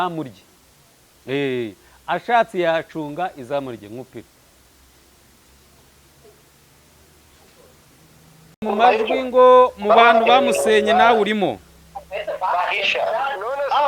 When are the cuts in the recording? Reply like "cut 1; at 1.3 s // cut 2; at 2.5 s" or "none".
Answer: cut 1; at 8.6 s

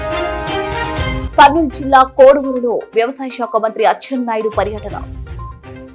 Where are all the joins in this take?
none

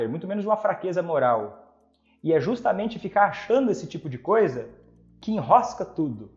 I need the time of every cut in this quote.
none

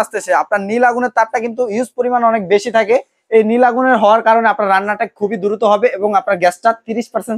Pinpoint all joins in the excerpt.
none

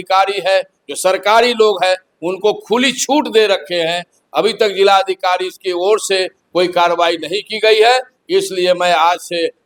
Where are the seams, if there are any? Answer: none

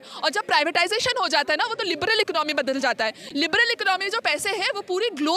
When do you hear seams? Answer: none

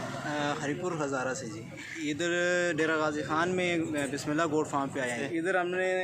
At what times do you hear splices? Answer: cut 1; at 1.8 s // cut 2; at 5.2 s

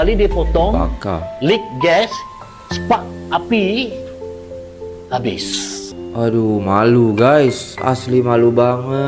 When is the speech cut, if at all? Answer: cut 1; at 5.9 s

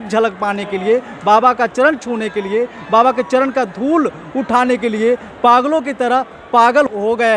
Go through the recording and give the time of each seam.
none

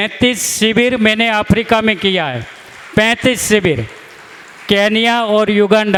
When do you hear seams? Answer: none

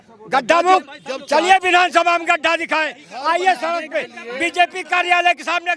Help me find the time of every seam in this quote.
none

